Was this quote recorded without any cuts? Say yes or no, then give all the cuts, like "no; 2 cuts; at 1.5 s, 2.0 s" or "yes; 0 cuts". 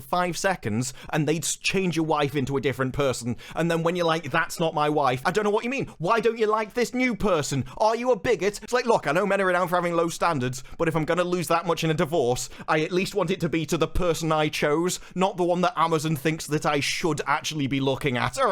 no; 2 cuts; at 5.2 s, 8.6 s